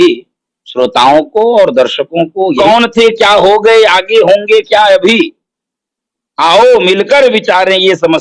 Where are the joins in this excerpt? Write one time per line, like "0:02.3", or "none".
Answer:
0:02.6